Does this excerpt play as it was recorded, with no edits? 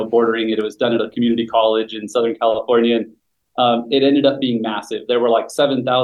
yes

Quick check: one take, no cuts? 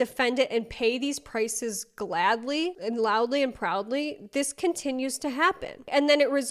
yes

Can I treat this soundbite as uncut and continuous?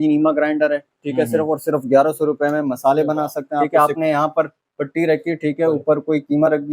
no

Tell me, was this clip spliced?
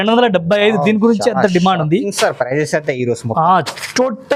no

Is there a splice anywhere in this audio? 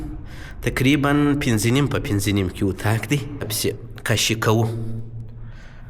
yes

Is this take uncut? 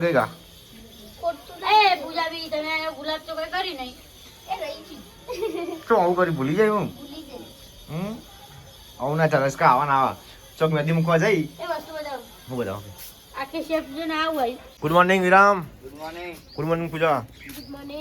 no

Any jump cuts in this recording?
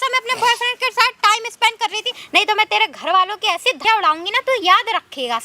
yes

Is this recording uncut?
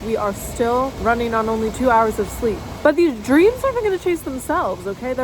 no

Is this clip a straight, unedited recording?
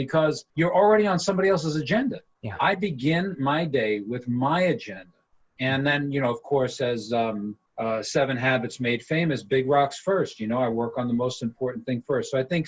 yes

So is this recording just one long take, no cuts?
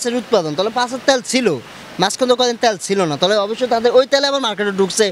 yes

